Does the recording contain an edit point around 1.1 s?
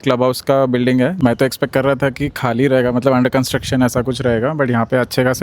yes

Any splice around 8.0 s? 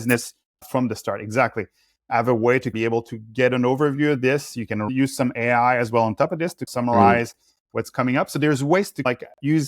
no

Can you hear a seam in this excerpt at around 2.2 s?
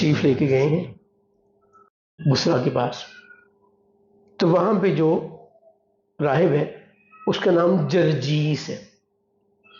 yes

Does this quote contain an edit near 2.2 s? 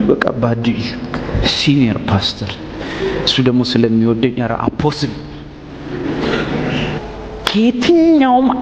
no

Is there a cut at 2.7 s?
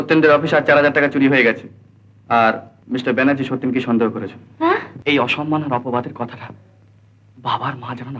yes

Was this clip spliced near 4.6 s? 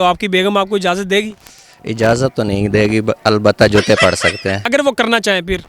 yes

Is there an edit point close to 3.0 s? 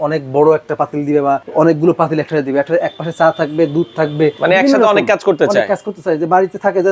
no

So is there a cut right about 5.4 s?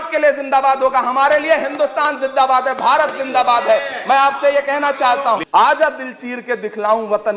yes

